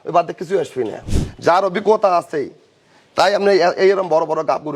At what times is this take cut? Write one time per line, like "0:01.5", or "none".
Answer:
0:01.0